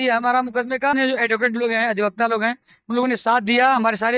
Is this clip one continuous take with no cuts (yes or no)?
no